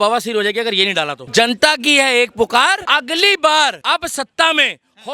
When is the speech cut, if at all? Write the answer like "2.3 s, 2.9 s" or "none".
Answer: 1.2 s, 2.8 s, 3.8 s

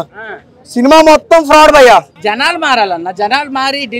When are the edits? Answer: 2.2 s

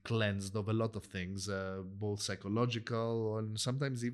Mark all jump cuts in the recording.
none

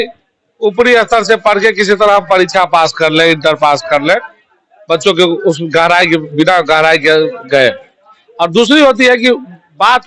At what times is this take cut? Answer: none

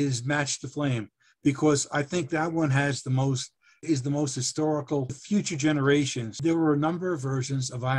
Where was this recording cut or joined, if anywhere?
3.8 s, 5.2 s, 6.3 s

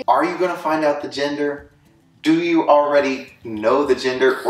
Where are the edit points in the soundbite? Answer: none

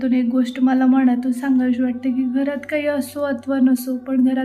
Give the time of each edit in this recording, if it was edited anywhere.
none

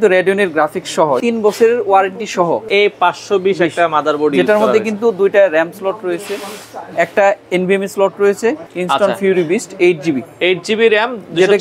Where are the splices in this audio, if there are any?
1.2 s, 2.7 s, 8.7 s

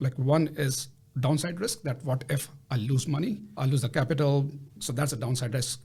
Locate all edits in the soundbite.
none

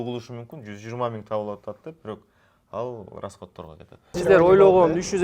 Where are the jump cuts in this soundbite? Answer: 4.2 s

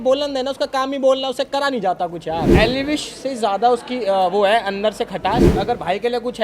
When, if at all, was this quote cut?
2.5 s, 5.5 s

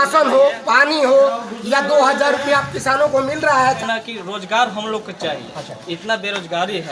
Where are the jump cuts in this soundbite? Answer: 3.8 s

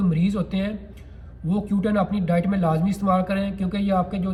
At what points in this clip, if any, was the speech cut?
none

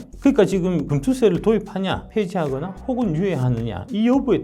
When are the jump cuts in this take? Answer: 0.9 s, 2.0 s

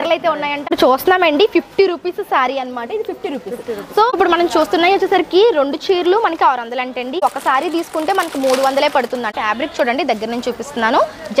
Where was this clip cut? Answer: 0.7 s, 4.1 s, 7.2 s, 9.3 s

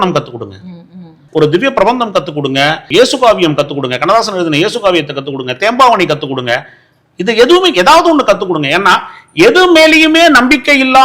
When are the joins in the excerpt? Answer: 1.2 s, 2.8 s

